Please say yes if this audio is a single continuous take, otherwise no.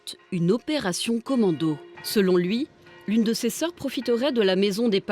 no